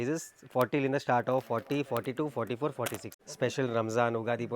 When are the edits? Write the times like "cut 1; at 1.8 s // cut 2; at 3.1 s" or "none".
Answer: cut 1; at 3.1 s

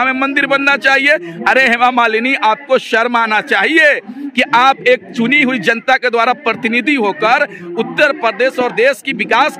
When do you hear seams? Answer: none

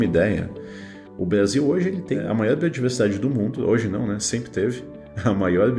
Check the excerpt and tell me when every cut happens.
cut 1; at 2.2 s

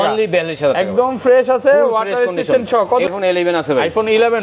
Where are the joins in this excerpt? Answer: cut 1; at 3.1 s

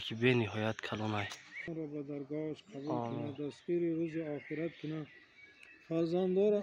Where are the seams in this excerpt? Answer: cut 1; at 1.7 s

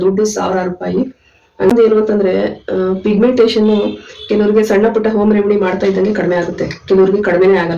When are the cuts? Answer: cut 1; at 1.7 s

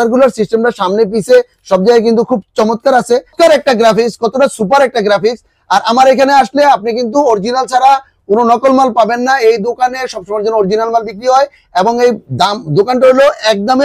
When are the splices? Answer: cut 1; at 3.3 s

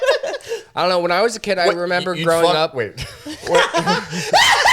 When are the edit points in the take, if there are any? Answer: none

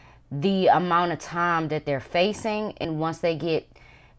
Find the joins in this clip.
cut 1; at 2.8 s

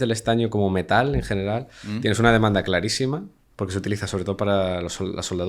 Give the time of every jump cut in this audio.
none

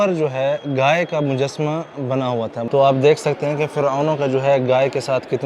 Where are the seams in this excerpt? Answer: cut 1; at 2.6 s

